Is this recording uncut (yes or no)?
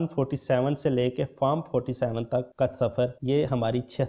yes